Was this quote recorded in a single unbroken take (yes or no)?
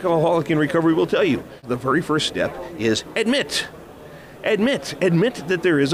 no